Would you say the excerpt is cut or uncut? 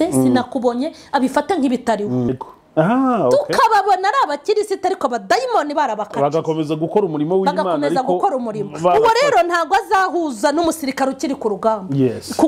cut